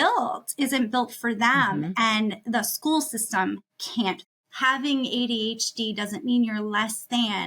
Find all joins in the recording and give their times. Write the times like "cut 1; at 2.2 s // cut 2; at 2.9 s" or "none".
cut 1; at 4.2 s